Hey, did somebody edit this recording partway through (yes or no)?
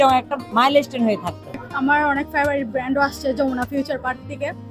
yes